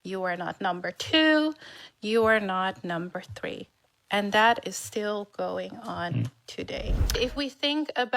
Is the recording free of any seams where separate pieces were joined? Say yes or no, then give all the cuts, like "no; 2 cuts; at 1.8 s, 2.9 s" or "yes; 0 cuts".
no; 1 cut; at 7.1 s